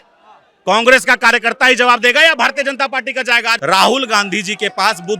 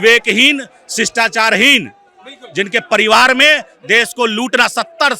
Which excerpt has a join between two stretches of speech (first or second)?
first